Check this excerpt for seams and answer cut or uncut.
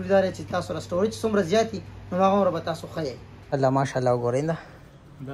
cut